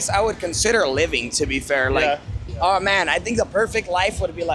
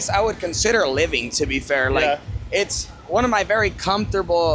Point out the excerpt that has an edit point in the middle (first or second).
first